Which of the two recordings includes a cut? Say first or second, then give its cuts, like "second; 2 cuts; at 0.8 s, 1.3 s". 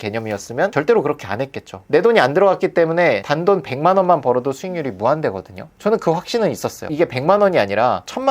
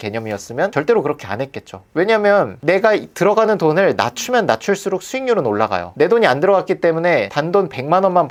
first; 2 cuts; at 1.8 s, 6.9 s